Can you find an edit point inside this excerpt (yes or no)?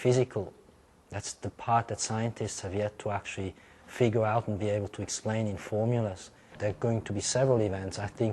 yes